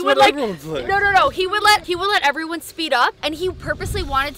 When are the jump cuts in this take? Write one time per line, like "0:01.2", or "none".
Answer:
0:01.8
0:03.2